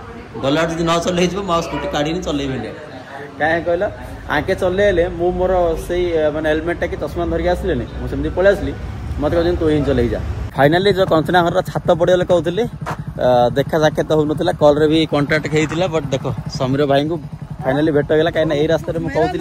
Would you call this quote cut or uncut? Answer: cut